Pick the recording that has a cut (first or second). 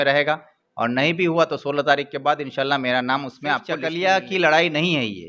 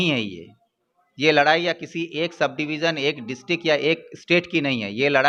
first